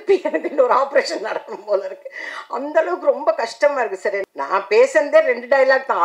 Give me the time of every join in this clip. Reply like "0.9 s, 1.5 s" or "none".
4.2 s